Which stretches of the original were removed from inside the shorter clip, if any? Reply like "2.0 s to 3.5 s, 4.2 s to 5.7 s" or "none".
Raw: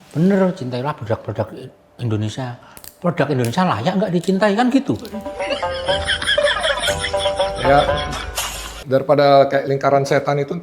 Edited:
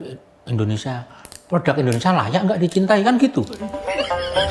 none